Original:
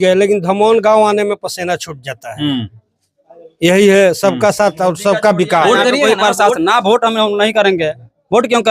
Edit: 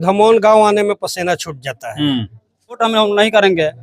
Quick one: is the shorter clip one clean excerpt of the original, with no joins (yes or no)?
no